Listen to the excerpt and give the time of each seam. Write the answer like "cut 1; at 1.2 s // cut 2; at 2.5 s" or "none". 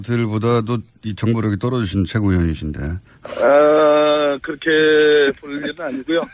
cut 1; at 5.3 s